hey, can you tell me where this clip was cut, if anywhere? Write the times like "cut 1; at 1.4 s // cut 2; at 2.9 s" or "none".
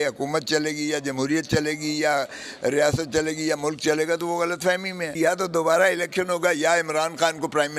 cut 1; at 5.1 s